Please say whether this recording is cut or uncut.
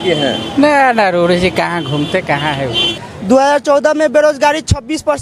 cut